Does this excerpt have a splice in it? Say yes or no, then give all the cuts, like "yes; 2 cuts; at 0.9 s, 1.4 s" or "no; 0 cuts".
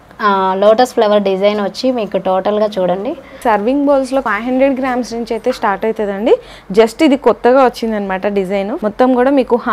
yes; 3 cuts; at 3.4 s, 4.2 s, 8.7 s